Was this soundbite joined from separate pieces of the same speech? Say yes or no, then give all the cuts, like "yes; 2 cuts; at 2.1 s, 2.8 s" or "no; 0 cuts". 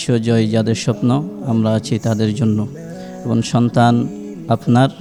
no; 0 cuts